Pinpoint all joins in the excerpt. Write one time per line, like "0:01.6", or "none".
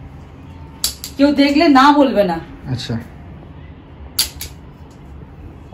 none